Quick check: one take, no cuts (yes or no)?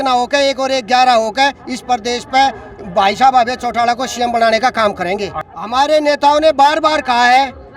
no